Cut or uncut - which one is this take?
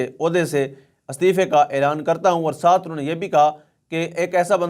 uncut